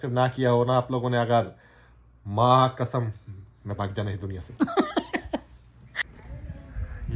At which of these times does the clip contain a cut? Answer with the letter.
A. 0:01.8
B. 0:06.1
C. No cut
B